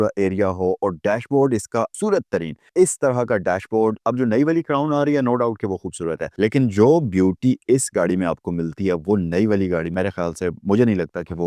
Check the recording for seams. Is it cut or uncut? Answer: cut